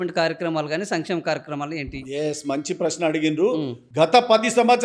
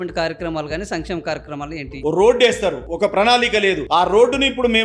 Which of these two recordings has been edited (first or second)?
second